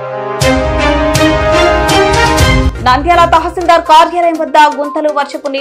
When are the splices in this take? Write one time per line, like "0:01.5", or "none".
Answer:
0:02.7

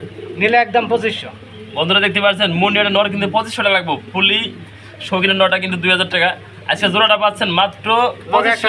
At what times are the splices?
none

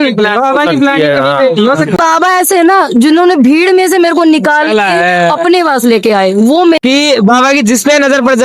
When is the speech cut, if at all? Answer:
0:02.0
0:06.8

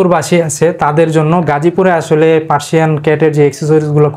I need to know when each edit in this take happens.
none

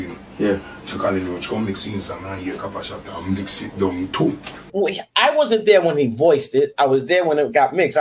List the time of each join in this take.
0:04.5

